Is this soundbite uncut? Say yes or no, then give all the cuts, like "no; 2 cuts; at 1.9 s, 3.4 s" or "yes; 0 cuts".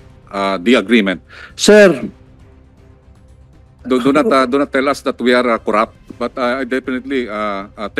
no; 1 cut; at 6.1 s